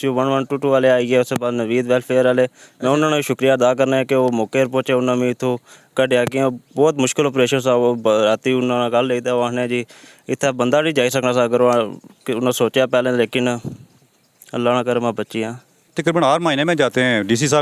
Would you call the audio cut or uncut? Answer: cut